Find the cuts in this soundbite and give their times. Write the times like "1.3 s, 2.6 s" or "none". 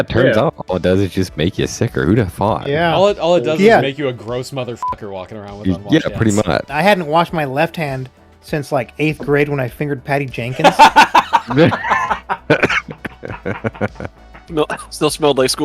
6.7 s